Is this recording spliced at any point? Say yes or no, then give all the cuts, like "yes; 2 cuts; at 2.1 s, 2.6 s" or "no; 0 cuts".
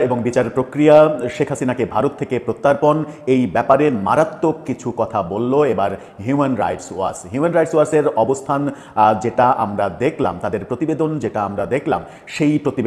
no; 0 cuts